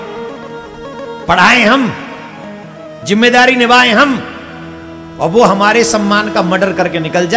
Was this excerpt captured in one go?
yes; 0 cuts

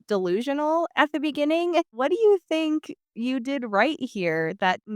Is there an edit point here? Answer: yes; 1 cut; at 1.9 s

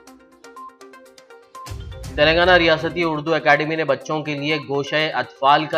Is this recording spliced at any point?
no; 0 cuts

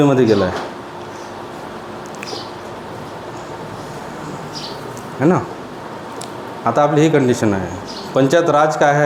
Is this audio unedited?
yes; 0 cuts

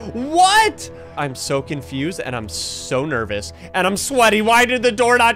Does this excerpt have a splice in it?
yes; 1 cut; at 1.2 s

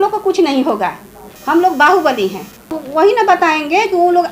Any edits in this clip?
yes; 1 cut; at 2.8 s

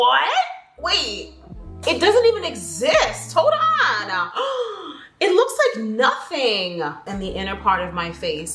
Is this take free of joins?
no; 1 cut; at 7.0 s

